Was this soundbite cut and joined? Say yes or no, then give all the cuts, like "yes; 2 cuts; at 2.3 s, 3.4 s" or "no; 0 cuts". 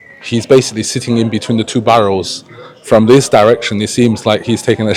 no; 0 cuts